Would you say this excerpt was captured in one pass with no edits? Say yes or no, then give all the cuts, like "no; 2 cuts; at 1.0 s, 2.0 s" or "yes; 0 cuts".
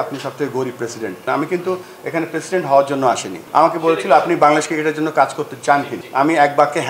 no; 3 cuts; at 1.2 s, 3.3 s, 6.0 s